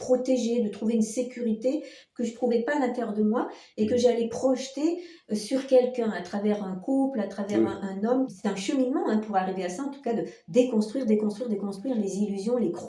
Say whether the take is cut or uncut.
cut